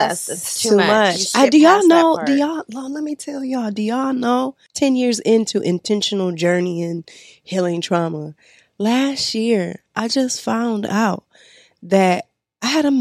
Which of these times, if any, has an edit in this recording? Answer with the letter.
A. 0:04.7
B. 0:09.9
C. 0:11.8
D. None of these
A